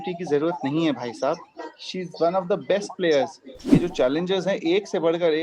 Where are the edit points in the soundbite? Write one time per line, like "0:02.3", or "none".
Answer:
0:03.8